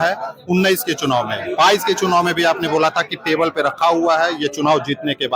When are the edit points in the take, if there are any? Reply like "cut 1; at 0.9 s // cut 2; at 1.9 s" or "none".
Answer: none